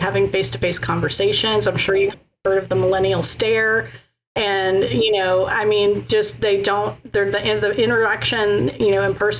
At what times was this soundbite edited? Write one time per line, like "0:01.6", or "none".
none